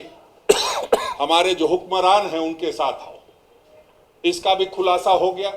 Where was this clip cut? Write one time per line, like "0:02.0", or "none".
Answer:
none